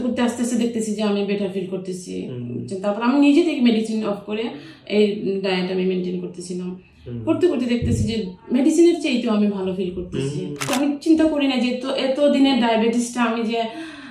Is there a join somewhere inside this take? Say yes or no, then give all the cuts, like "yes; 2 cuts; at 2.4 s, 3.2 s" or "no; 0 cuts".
yes; 1 cut; at 10.7 s